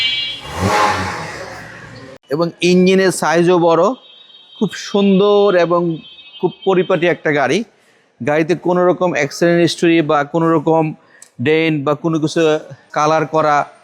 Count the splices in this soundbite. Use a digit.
2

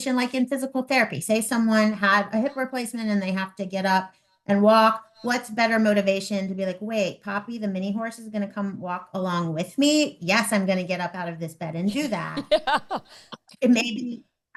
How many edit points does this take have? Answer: 0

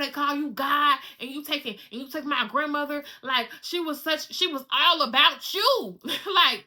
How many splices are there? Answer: 0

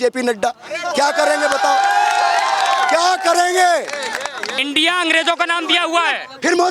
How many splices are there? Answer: 1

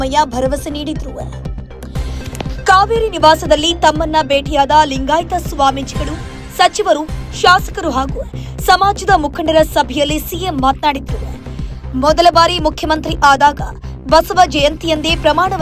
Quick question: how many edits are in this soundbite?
2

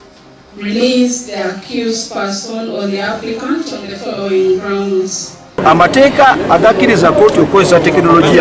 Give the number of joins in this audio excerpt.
1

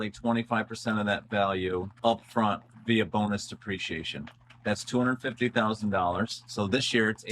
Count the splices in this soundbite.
1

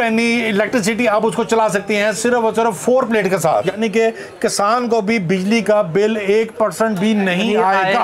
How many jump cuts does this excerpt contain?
1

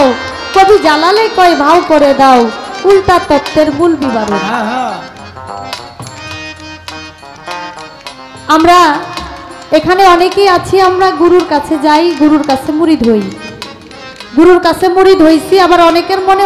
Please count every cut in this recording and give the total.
0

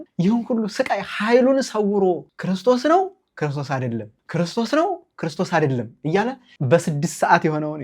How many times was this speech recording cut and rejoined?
1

